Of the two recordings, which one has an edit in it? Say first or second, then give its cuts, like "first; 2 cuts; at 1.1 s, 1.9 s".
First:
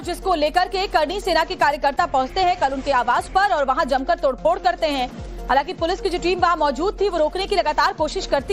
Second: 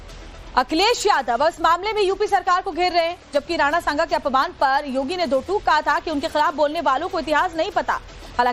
first; 1 cut; at 4.9 s